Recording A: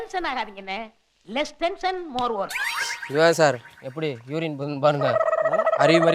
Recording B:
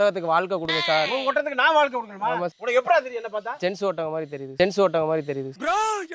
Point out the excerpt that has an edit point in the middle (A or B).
A